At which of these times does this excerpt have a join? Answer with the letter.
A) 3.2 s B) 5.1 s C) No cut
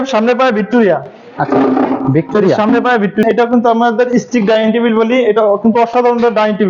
A